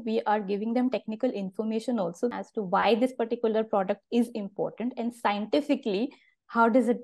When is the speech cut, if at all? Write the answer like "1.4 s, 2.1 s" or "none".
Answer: 2.3 s